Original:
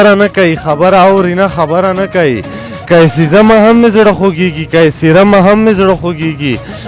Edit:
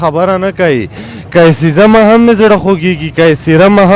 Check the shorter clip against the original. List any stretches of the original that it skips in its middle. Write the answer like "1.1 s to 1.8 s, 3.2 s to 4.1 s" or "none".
none